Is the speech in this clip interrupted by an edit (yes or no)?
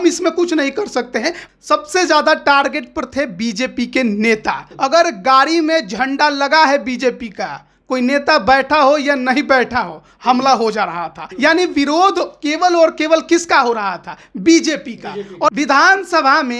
yes